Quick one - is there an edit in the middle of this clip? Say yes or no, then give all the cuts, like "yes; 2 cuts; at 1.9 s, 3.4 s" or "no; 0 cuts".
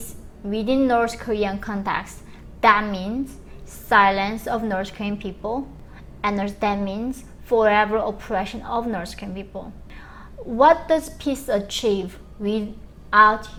no; 0 cuts